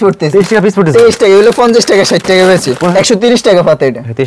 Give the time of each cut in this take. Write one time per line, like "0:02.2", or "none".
0:02.9